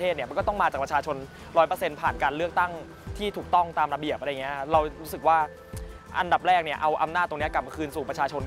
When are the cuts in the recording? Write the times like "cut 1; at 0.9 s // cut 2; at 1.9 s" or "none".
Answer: none